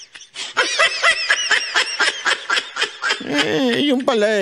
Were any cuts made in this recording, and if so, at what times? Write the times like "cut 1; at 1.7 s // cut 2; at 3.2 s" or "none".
none

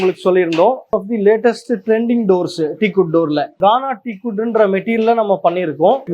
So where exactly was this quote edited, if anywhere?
cut 1; at 0.9 s // cut 2; at 3.5 s

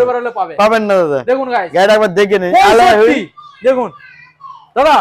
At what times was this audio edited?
none

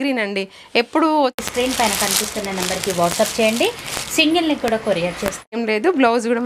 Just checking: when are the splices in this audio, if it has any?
cut 1; at 1.4 s // cut 2; at 5.4 s

